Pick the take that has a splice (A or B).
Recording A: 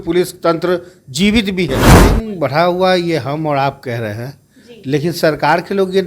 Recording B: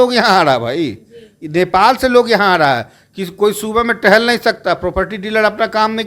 A